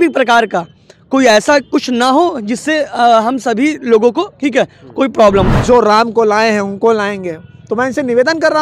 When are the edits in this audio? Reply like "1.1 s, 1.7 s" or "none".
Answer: 5.5 s